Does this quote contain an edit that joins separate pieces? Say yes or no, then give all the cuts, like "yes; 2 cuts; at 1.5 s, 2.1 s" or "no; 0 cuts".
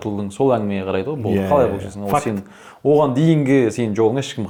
no; 0 cuts